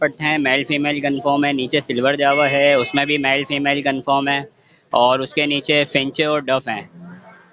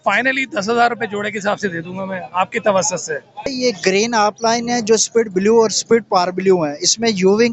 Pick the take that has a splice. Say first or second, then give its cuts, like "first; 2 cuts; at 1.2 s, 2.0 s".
second; 1 cut; at 3.5 s